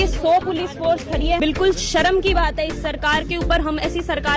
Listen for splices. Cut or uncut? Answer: uncut